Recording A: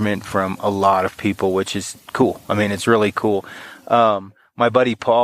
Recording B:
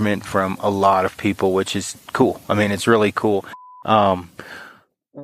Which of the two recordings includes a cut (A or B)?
B